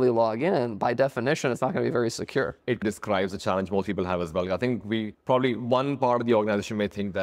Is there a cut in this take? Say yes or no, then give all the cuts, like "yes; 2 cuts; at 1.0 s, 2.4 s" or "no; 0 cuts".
no; 0 cuts